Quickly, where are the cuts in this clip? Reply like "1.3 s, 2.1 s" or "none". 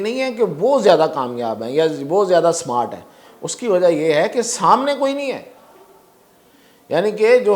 none